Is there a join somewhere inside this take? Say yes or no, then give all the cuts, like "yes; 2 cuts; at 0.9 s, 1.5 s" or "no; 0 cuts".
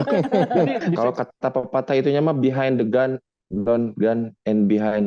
yes; 1 cut; at 1.0 s